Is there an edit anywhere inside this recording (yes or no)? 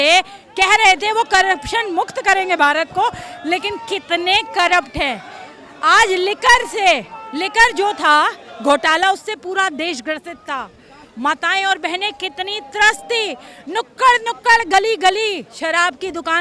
no